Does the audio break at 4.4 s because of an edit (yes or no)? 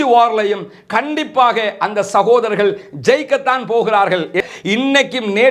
yes